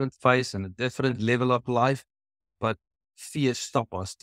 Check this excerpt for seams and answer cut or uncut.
uncut